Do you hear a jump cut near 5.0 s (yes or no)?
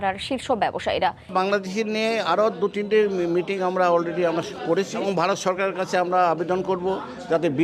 yes